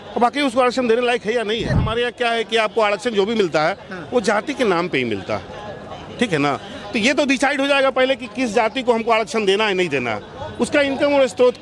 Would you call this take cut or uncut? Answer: cut